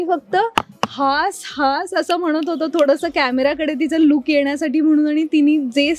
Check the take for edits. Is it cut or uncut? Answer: uncut